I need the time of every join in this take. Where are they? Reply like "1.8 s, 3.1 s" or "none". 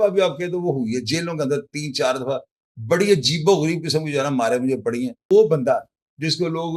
5.2 s